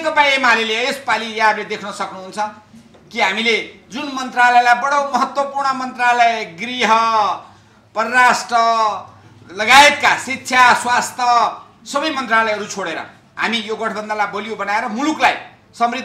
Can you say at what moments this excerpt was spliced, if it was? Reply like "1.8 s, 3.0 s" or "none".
none